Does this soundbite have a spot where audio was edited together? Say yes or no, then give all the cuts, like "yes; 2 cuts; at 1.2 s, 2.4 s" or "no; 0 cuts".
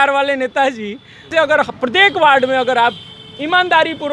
yes; 1 cut; at 1.3 s